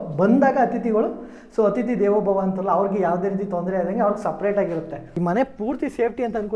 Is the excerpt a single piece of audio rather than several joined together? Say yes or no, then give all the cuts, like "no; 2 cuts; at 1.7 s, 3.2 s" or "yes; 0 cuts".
no; 1 cut; at 5.0 s